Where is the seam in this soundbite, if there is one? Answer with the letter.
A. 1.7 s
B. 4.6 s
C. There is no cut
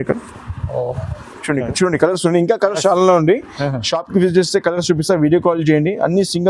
A